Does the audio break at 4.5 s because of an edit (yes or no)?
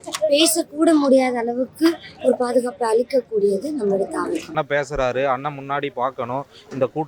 yes